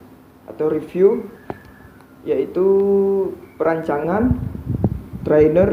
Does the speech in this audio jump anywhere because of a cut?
no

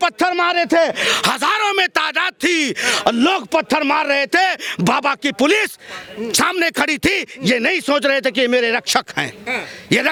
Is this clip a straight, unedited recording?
yes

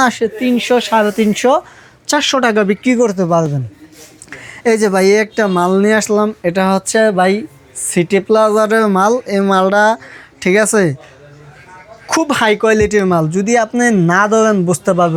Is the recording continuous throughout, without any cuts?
yes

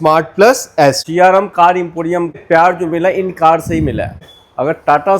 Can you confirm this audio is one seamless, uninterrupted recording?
no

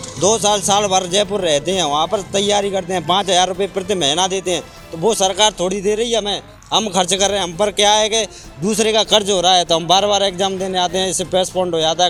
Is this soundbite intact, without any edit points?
yes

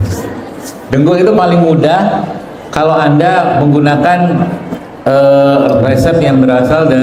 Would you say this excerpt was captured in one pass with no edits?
yes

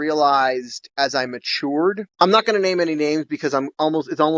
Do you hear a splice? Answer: no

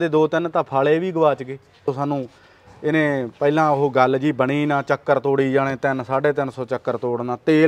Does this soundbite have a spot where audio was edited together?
yes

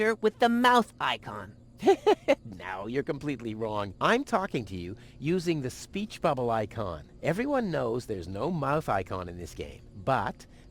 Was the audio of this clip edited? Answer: no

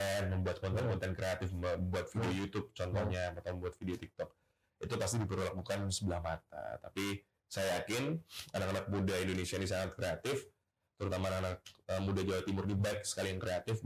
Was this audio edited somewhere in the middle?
no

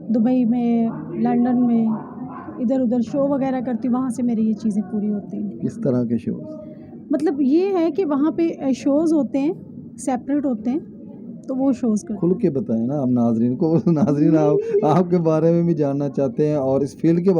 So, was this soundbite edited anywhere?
no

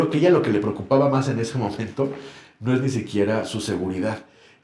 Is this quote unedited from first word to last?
yes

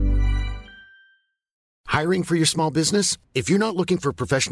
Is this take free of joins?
no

